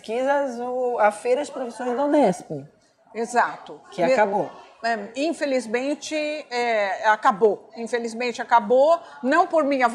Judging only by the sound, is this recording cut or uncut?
cut